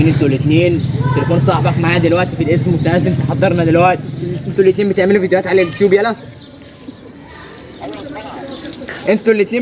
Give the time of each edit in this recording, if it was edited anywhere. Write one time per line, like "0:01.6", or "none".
0:04.4